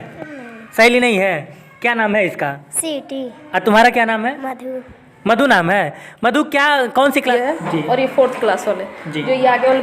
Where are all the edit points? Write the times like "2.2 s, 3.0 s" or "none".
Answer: 7.3 s